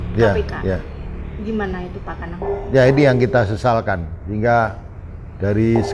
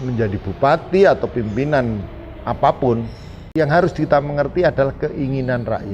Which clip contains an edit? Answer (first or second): second